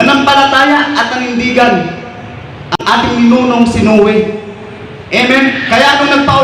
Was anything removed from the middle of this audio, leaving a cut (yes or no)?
yes